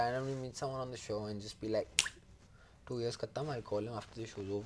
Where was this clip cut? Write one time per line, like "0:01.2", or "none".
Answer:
none